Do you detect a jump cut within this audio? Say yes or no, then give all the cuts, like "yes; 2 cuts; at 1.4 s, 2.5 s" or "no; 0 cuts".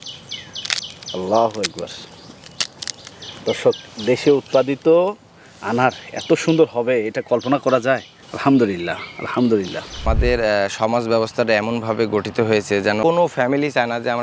yes; 2 cuts; at 10.0 s, 13.0 s